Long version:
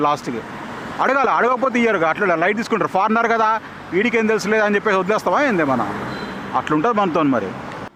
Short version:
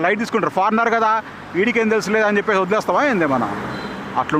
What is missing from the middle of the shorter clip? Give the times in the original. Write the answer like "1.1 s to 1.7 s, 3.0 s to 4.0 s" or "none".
none